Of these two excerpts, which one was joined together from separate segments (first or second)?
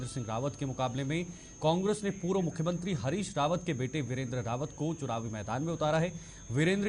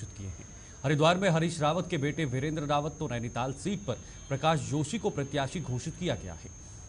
first